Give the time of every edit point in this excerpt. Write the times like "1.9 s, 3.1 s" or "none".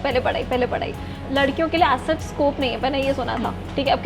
1.2 s